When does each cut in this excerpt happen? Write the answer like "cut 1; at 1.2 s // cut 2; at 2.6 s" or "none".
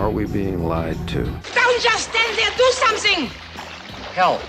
cut 1; at 1.4 s